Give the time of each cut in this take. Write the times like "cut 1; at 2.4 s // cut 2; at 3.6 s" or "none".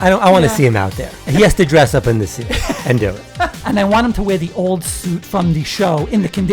cut 1; at 1.2 s // cut 2; at 3.6 s